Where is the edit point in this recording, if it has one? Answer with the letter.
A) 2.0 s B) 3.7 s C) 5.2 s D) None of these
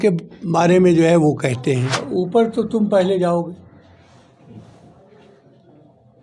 A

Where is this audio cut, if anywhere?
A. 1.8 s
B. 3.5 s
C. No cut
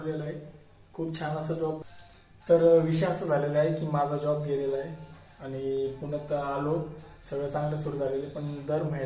A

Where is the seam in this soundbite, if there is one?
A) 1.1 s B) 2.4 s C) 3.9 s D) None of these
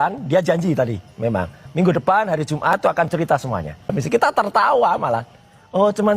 C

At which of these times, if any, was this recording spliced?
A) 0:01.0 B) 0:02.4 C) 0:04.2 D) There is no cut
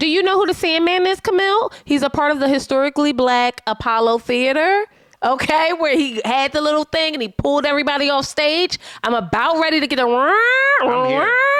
D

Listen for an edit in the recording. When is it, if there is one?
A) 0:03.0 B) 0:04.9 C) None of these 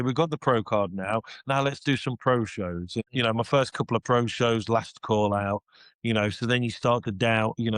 A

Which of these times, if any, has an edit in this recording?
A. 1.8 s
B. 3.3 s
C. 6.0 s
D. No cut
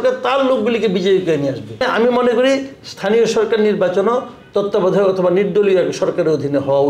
A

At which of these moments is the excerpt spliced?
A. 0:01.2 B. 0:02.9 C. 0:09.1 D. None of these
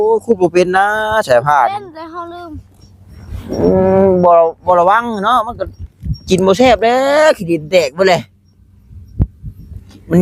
D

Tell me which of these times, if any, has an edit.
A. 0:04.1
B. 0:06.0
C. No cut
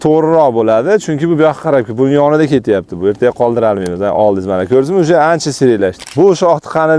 B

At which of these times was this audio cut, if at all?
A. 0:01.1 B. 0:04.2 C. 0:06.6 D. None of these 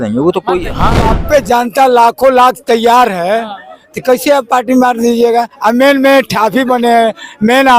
A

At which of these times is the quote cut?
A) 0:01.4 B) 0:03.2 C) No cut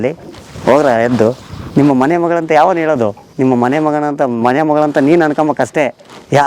B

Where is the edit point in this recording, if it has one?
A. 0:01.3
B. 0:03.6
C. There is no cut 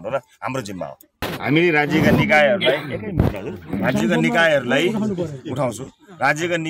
A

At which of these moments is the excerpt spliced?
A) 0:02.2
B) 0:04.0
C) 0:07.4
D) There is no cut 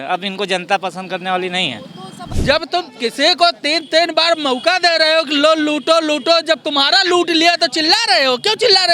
A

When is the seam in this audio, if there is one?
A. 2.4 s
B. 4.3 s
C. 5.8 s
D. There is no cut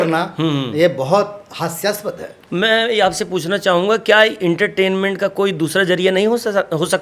A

